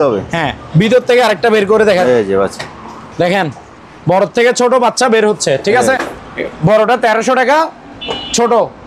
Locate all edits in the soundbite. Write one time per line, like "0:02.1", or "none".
0:02.0
0:06.0